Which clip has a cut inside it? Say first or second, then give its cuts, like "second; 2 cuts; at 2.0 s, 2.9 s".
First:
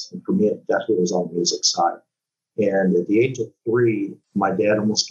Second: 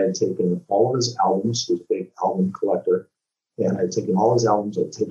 first; 1 cut; at 4.2 s